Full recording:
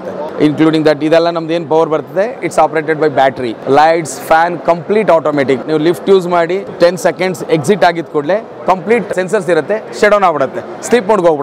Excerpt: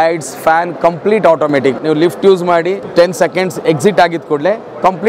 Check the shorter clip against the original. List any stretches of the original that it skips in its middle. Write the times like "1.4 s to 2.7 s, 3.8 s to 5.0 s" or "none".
none